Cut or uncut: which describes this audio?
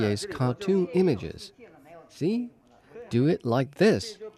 uncut